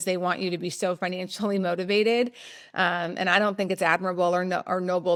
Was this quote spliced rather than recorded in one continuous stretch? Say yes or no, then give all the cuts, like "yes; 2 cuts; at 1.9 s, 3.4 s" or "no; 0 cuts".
no; 0 cuts